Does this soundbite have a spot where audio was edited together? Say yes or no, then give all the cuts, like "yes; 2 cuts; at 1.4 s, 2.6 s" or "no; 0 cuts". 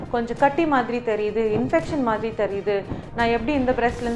no; 0 cuts